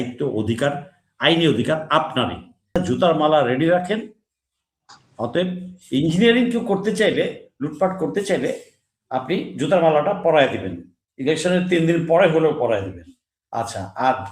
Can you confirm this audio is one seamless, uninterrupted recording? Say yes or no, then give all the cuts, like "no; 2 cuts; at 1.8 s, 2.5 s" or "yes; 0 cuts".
no; 1 cut; at 2.8 s